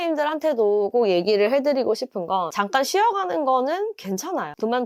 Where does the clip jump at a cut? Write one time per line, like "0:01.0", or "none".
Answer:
none